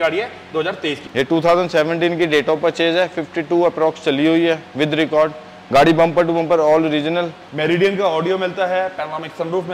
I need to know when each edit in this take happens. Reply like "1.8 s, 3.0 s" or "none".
1.0 s, 7.4 s